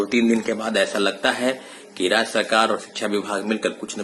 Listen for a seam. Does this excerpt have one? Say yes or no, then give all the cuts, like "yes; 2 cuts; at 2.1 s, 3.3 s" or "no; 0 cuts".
no; 0 cuts